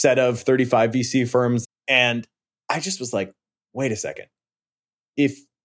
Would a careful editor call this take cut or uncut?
cut